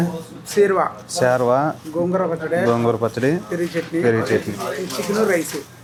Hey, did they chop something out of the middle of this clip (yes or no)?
no